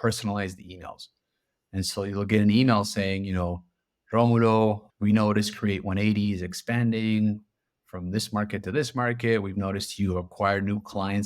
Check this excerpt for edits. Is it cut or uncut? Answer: cut